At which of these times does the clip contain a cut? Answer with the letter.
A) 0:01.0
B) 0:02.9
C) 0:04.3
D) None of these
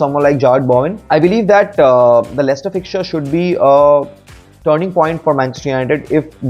A